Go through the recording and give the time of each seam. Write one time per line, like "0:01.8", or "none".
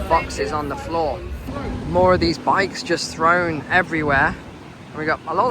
0:01.4